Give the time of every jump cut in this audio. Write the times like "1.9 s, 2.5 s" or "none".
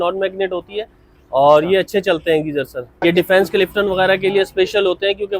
3.0 s

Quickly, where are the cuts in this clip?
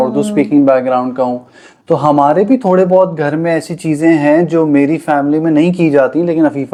none

